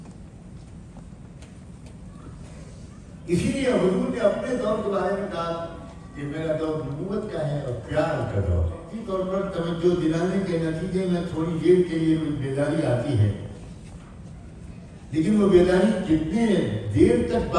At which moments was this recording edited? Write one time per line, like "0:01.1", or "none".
0:08.9